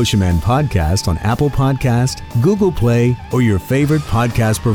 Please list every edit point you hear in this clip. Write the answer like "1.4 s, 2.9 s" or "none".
2.3 s